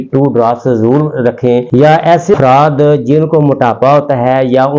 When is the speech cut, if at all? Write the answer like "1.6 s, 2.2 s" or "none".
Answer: 1.7 s, 2.4 s